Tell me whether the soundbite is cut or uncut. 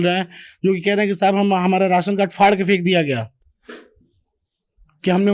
uncut